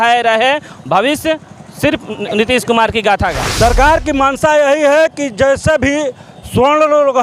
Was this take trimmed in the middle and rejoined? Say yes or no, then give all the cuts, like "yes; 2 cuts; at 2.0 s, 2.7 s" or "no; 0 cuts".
yes; 1 cut; at 3.3 s